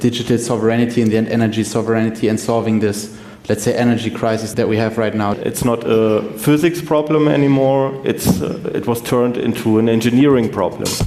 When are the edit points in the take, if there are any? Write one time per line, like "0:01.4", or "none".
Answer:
0:04.5
0:05.4